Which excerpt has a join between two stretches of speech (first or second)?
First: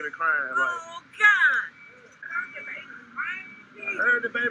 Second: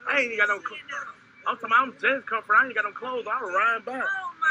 first